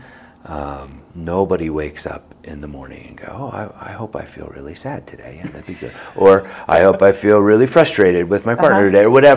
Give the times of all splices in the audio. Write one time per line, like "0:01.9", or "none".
none